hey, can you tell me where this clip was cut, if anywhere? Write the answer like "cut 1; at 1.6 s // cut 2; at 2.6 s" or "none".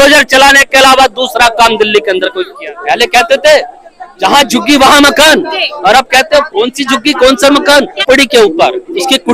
cut 1; at 2.7 s // cut 2; at 8.0 s